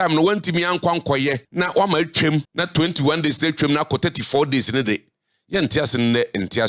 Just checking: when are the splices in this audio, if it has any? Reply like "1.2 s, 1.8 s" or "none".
1.4 s, 2.6 s